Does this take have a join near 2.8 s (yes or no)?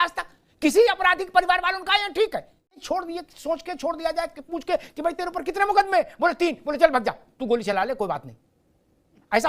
yes